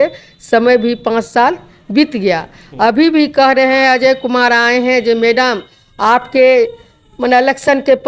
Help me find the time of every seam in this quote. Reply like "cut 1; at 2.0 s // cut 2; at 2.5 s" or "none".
none